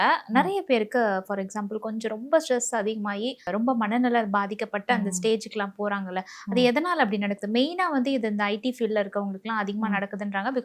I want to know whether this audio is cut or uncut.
cut